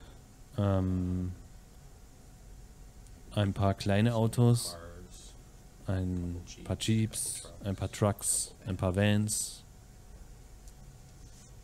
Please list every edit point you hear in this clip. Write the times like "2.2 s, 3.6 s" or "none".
none